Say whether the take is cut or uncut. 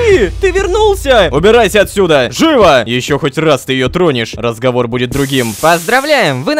cut